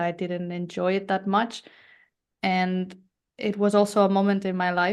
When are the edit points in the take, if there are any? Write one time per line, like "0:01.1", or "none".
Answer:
none